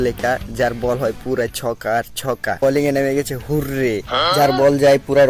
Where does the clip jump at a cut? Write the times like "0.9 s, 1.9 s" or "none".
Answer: 2.6 s